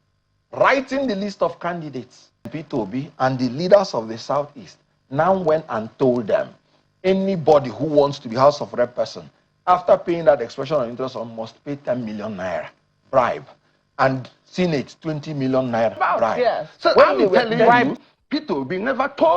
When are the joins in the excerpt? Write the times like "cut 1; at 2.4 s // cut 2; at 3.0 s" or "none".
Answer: cut 1; at 2.5 s // cut 2; at 17.9 s

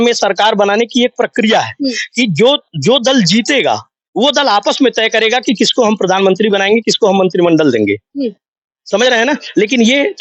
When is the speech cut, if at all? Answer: none

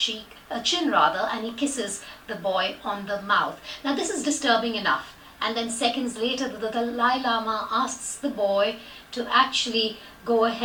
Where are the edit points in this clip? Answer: none

